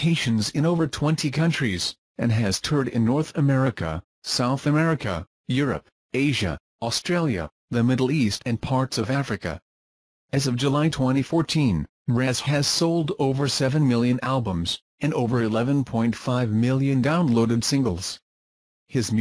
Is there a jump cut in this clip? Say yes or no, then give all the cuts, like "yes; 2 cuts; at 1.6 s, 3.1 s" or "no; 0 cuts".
yes; 1 cut; at 5.2 s